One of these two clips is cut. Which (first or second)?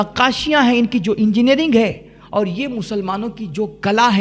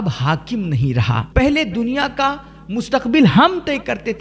second